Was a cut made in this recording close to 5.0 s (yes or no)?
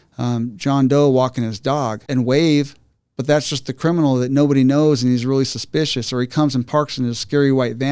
no